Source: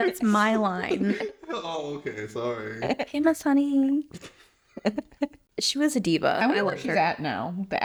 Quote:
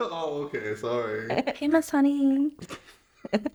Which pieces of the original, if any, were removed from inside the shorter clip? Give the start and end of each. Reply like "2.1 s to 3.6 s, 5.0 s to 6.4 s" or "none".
none